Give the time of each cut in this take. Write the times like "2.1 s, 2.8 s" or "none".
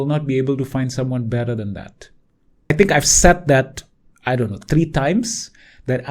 2.7 s